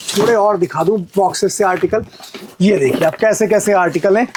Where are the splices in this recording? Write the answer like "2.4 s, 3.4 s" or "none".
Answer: none

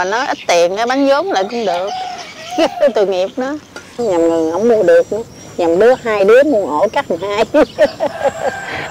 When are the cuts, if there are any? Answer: 3.9 s

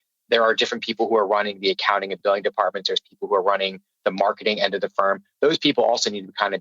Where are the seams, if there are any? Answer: none

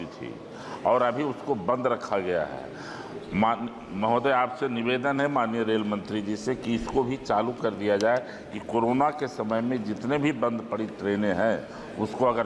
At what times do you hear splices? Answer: none

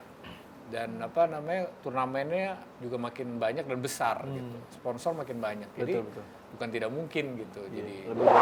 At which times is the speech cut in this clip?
none

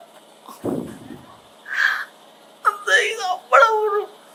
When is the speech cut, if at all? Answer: none

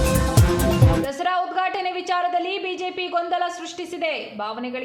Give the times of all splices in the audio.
0.9 s

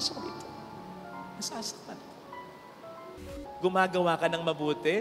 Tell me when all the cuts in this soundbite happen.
3.4 s

